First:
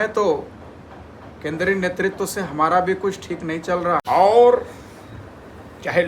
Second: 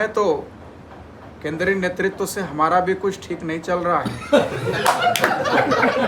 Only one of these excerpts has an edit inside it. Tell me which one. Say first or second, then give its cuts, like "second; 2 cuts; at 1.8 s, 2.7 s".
first; 1 cut; at 4.0 s